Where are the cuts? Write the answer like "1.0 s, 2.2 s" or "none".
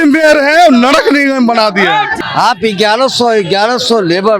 2.1 s